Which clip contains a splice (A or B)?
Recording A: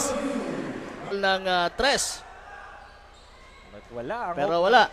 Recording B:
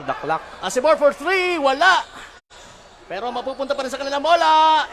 A